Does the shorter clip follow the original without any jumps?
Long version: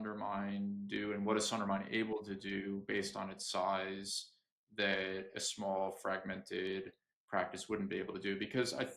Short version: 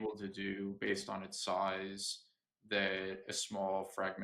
yes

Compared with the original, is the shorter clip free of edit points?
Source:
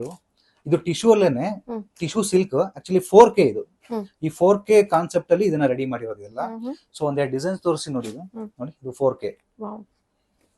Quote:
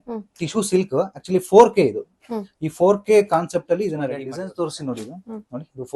no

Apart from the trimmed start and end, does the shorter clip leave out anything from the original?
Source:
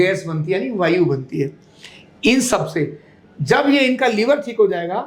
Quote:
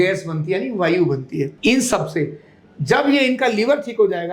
yes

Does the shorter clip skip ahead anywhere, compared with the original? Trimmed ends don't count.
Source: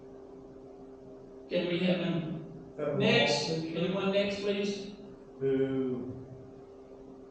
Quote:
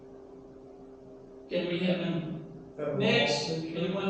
no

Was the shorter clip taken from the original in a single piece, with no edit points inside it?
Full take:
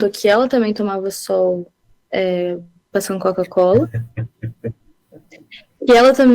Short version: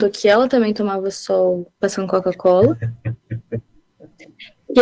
no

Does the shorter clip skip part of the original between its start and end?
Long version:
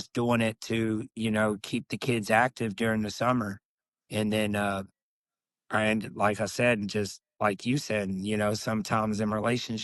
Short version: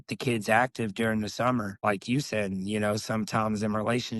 yes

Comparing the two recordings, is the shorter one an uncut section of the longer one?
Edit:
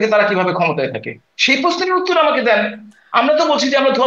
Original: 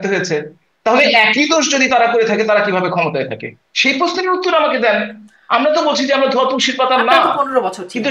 yes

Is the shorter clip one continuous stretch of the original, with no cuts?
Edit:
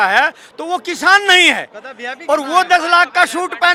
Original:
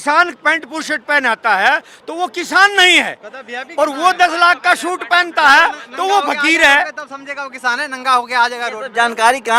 yes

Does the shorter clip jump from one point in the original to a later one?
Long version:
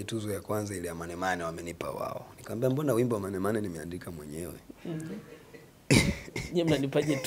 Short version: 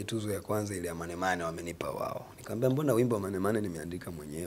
no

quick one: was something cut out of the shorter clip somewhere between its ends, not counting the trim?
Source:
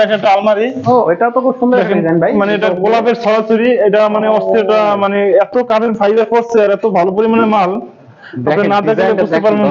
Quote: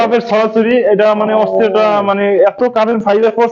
no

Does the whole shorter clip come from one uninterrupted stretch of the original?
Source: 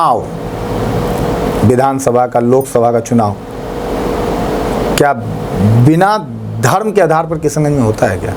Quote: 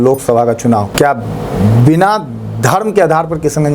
no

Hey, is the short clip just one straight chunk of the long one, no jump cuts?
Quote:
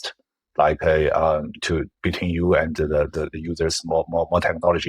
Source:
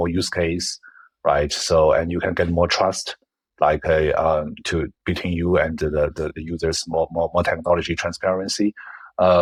yes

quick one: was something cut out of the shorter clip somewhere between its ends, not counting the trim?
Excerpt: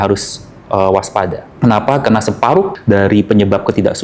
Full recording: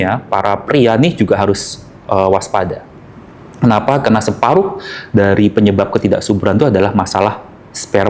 yes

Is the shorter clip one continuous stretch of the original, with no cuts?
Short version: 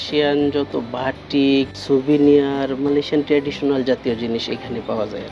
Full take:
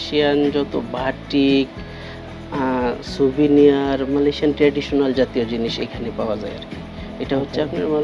no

